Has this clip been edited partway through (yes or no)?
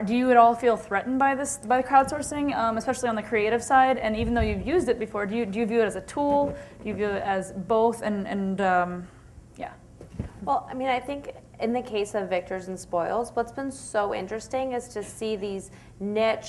yes